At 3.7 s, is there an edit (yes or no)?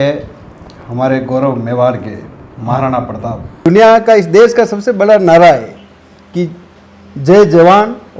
yes